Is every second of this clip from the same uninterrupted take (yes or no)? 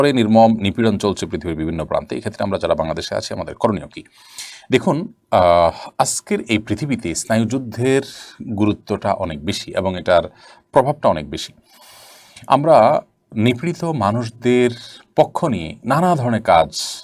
yes